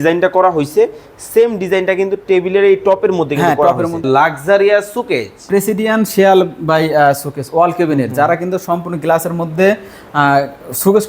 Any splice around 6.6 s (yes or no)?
no